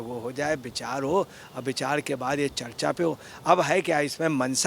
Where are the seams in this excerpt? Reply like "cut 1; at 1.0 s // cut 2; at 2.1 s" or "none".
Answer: none